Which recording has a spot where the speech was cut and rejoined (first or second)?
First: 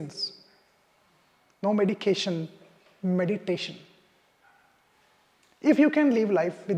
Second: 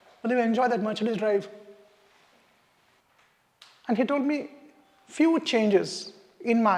second